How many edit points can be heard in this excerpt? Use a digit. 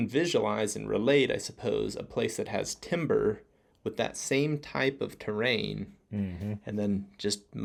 0